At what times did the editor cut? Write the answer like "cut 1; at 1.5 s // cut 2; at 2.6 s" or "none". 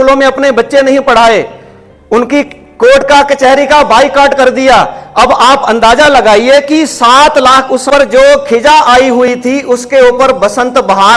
cut 1; at 7.9 s